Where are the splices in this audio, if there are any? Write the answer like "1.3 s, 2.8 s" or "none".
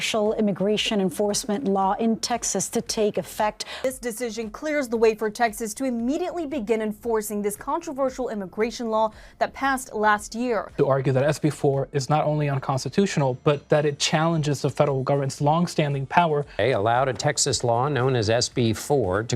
3.7 s, 10.7 s, 16.5 s